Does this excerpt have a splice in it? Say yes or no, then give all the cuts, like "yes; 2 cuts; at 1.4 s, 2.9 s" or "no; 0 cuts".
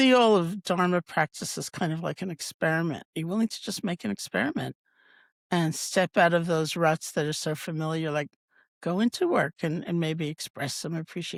no; 0 cuts